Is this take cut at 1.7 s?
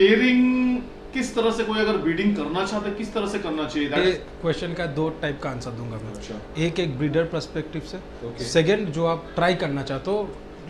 no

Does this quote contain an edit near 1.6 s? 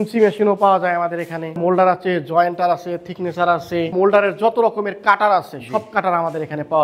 yes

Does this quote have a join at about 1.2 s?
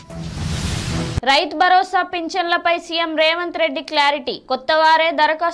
yes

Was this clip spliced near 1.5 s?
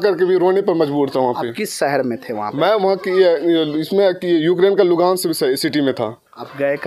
no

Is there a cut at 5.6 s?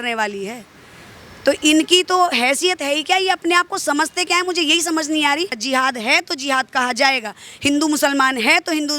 yes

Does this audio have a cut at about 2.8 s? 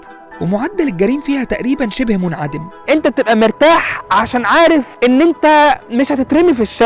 yes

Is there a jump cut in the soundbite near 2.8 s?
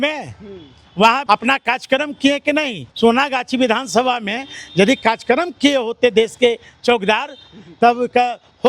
yes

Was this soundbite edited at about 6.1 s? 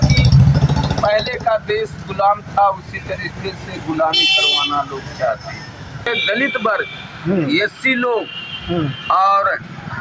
yes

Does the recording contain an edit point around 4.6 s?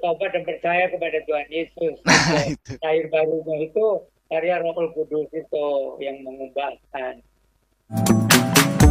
no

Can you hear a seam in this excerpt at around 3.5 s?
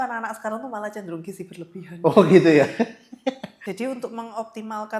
yes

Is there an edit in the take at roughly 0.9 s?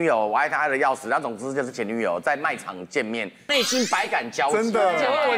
no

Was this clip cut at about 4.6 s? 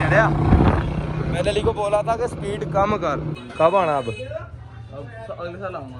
no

